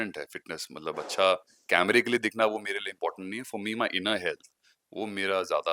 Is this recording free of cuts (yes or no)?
yes